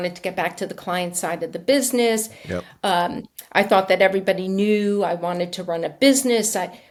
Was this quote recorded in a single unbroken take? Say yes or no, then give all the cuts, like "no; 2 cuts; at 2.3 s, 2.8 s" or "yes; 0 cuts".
yes; 0 cuts